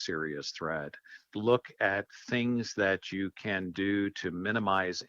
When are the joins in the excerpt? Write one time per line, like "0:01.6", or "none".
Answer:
0:01.3